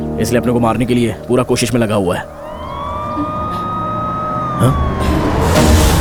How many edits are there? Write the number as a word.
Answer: zero